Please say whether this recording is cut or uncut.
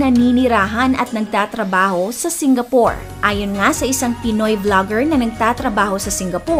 uncut